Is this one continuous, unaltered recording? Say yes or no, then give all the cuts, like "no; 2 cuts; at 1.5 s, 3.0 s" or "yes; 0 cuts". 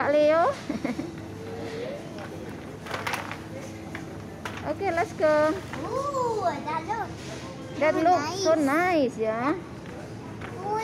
yes; 0 cuts